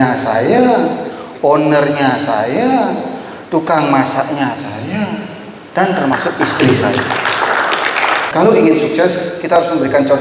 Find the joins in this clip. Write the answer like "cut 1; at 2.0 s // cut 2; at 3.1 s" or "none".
cut 1; at 8.3 s